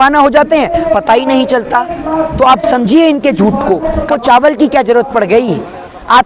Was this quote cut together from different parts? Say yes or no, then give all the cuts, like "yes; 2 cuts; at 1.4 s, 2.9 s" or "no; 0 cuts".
yes; 1 cut; at 4.1 s